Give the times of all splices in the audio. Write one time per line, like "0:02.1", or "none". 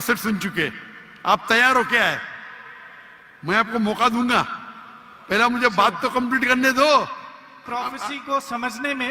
0:07.6